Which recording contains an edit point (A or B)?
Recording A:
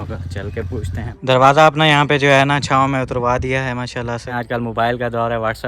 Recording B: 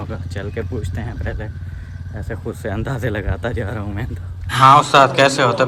A